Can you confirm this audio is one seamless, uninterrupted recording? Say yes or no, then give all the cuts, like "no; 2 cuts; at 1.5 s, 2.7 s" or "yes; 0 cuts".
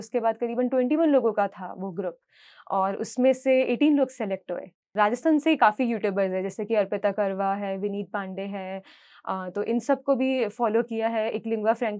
no; 1 cut; at 4.9 s